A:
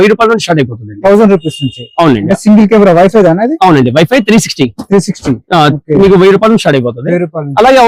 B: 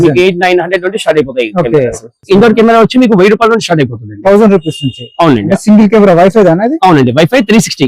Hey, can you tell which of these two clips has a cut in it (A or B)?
B